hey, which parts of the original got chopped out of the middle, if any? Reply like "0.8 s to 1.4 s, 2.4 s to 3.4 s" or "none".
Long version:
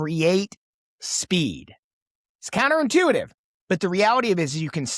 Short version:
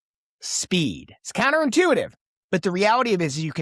1.7 s to 2.3 s